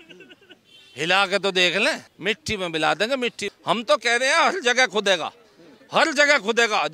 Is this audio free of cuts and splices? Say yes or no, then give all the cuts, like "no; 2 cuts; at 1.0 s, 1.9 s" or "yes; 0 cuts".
no; 2 cuts; at 2.1 s, 3.5 s